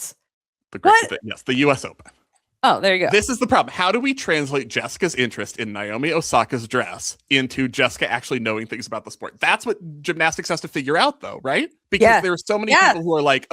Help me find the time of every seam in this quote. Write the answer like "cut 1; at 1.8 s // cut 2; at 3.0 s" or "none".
cut 1; at 11.8 s